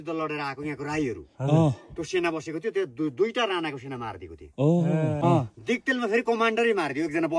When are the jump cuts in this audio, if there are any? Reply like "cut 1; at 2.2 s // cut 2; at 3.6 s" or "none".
cut 1; at 5.2 s